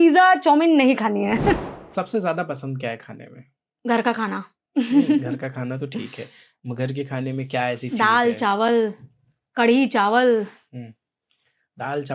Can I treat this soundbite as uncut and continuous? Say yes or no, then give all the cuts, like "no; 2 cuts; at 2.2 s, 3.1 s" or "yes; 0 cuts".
no; 1 cut; at 1.8 s